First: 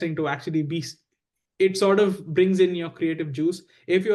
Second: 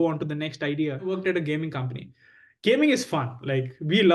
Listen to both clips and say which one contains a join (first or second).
second